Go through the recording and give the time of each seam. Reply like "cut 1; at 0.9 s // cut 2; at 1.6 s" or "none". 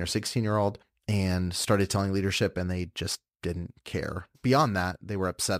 cut 1; at 0.9 s // cut 2; at 4.3 s